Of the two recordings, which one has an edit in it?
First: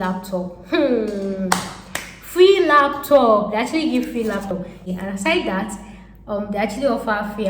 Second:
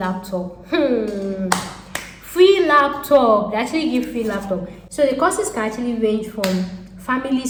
first; 1 cut; at 4.8 s

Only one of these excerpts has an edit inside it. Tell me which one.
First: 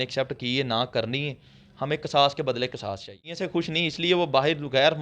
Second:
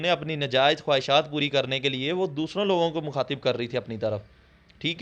first; 1 cut; at 3.4 s

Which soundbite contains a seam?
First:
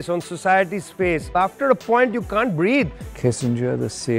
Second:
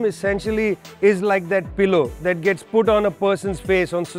first; 2 cuts; at 1.3 s, 3.0 s

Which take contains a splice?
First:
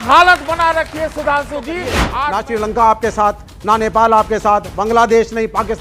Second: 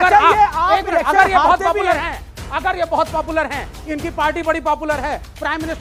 first; 1 cut; at 2.0 s

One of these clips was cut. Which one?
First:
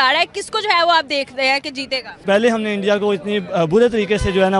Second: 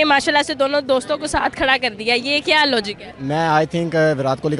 first; 1 cut; at 2.2 s

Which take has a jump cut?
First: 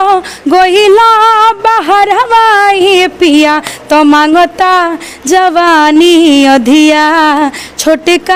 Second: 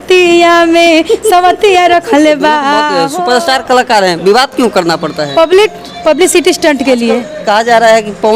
second; 2 cuts; at 3.0 s, 7.3 s

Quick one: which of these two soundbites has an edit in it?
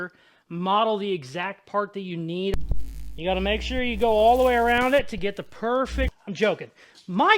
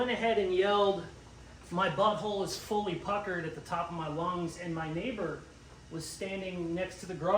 first; 2 cuts; at 2.5 s, 6.2 s

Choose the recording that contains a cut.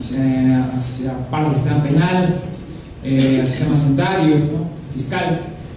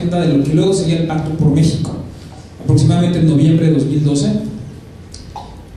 first; 1 cut; at 4.5 s

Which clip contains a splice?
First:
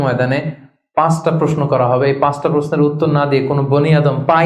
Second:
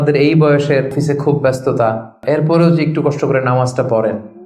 second; 2 cuts; at 0.9 s, 2.2 s

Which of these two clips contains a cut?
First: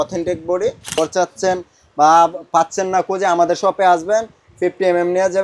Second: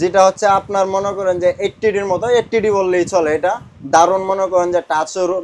first; 1 cut; at 1.0 s

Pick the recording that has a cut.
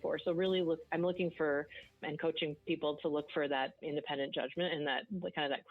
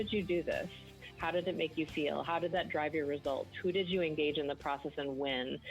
first; 2 cuts; at 2.0 s, 3.8 s

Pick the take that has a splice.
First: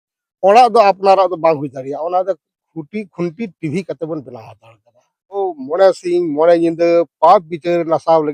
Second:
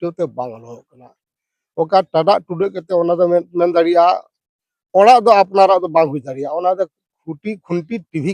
first; 1 cut; at 5.4 s

